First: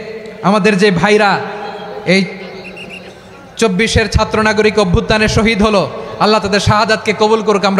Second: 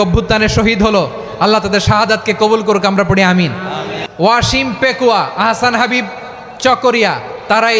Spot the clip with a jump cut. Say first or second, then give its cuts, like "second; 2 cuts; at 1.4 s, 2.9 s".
second; 1 cut; at 4.0 s